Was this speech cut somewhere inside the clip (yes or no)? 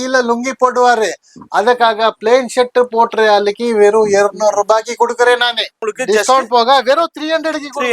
yes